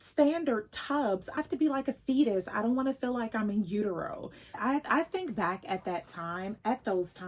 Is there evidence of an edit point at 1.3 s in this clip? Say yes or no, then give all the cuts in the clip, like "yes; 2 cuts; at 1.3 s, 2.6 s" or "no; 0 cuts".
yes; 2 cuts; at 1.3 s, 4.6 s